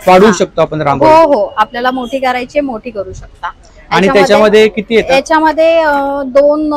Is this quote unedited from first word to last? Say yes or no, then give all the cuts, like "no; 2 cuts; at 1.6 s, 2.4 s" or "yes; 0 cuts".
yes; 0 cuts